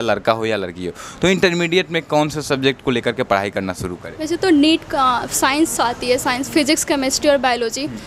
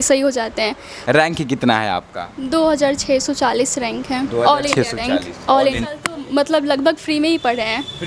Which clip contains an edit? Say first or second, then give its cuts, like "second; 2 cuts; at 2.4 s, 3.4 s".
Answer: second; 2 cuts; at 0.9 s, 5.8 s